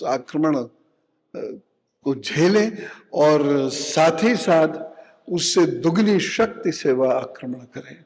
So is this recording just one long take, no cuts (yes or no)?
yes